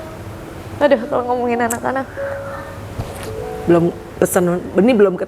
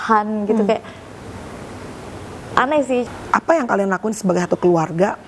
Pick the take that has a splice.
second; 1 cut; at 3.0 s

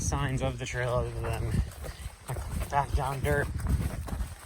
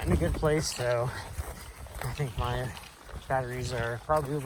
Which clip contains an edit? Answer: first; 1 cut; at 3.5 s

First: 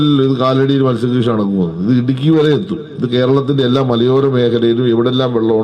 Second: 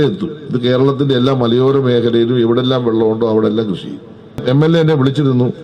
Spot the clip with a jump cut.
second; 1 cut; at 4.4 s

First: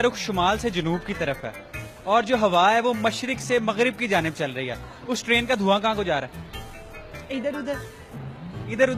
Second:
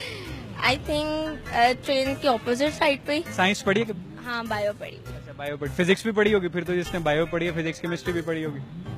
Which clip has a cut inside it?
second; 1 cut; at 3.3 s

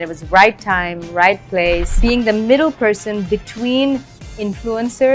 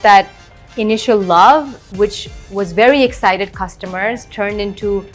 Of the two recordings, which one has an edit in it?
first; 1 cut; at 1.9 s

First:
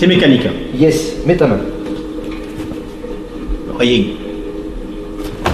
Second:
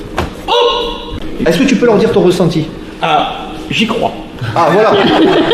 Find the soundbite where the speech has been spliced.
second; 1 cut; at 1.2 s

